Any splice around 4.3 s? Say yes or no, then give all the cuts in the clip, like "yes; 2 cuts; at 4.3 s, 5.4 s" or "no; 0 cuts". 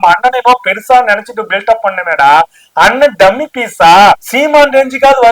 yes; 1 cut; at 4.3 s